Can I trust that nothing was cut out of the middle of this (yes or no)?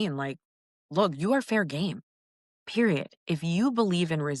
no